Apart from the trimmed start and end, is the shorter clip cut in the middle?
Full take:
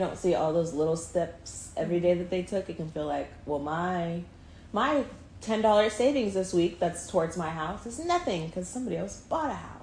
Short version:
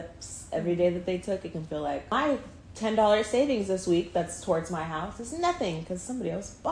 yes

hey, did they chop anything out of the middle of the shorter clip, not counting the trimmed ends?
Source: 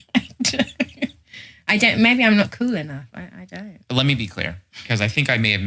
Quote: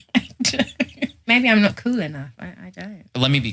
yes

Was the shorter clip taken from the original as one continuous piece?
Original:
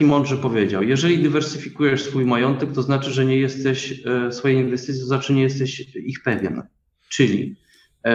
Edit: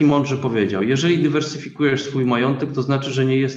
yes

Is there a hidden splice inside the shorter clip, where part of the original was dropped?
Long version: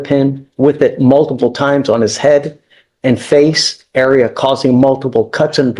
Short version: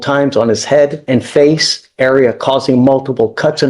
yes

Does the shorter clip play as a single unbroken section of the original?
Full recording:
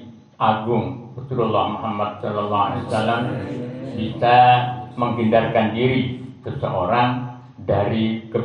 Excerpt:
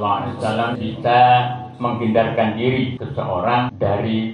no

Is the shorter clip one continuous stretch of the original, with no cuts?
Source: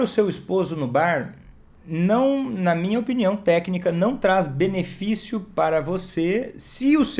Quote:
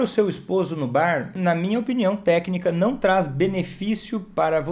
no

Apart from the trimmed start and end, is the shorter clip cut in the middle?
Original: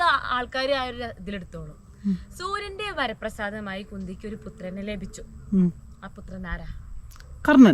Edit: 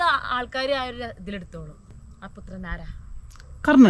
yes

